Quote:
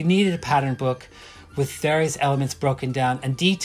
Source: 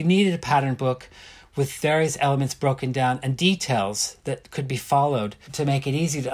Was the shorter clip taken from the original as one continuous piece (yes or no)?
yes